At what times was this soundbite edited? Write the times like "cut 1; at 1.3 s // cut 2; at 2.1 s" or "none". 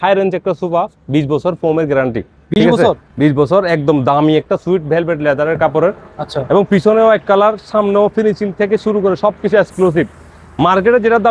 none